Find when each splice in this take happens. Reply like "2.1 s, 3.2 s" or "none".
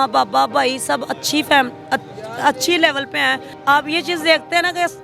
3.5 s

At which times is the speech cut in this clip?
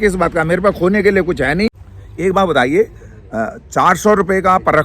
1.9 s

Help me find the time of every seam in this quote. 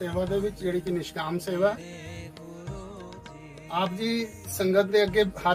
none

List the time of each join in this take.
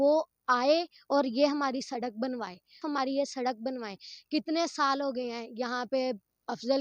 2.8 s

